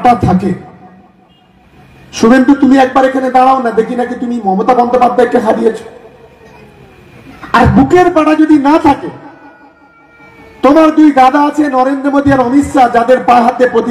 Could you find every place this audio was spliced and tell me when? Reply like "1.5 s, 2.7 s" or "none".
none